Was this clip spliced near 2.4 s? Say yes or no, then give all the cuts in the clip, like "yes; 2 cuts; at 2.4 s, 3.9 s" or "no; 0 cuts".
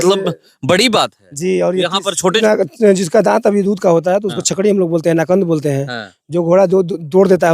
yes; 1 cut; at 2.4 s